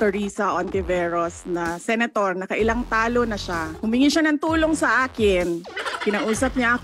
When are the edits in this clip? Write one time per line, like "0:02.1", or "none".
0:03.7
0:05.7

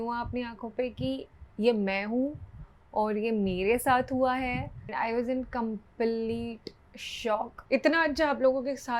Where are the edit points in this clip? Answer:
0:04.9
0:07.6

